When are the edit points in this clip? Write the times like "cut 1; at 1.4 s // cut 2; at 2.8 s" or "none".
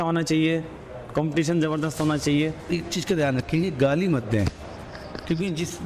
cut 1; at 2.7 s